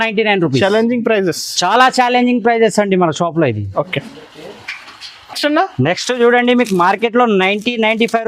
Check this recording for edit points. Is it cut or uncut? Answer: uncut